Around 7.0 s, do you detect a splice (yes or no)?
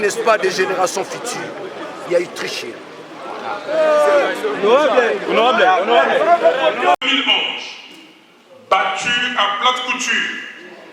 yes